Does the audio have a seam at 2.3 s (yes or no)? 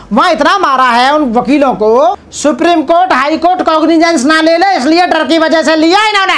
yes